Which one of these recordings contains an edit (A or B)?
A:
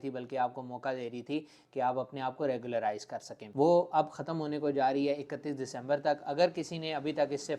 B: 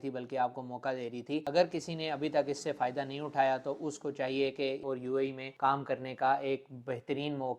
B